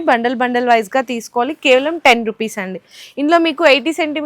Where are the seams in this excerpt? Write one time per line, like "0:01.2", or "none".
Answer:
none